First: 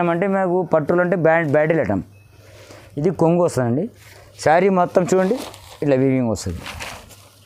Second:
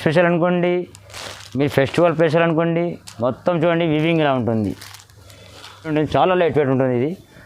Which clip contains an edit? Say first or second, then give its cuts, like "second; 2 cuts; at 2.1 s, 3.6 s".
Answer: second; 1 cut; at 5.9 s